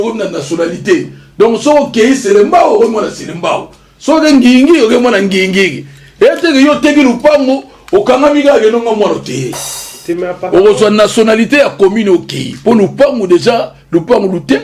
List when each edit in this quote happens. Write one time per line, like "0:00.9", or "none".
none